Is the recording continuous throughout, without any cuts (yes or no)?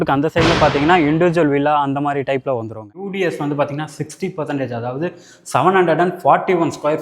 no